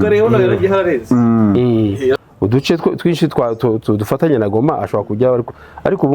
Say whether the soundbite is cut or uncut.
cut